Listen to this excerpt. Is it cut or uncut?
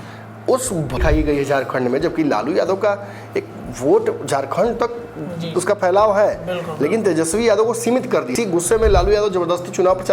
cut